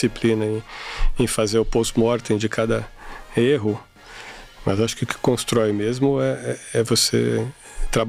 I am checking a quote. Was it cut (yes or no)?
no